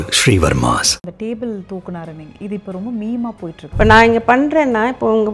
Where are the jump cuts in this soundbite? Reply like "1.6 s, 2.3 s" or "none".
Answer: 1.0 s, 3.6 s